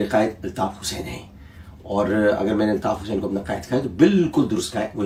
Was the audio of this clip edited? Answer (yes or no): no